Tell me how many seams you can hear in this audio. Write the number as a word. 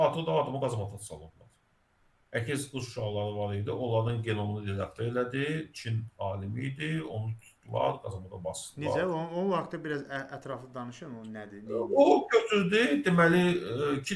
zero